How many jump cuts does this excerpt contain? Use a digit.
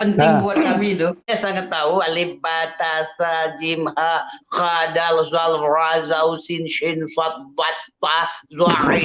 1